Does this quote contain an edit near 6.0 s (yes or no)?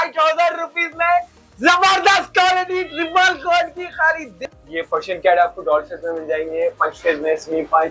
no